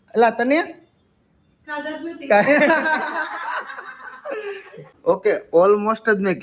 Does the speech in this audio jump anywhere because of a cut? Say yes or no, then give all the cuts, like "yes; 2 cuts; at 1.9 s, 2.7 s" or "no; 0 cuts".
yes; 1 cut; at 4.9 s